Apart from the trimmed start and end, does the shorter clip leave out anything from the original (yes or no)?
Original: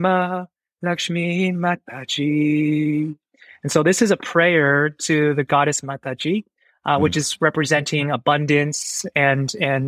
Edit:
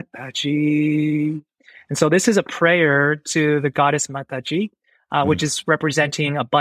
no